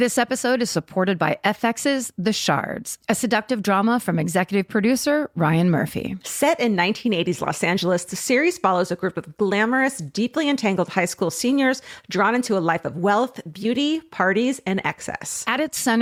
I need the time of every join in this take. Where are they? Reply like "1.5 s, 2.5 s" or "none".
none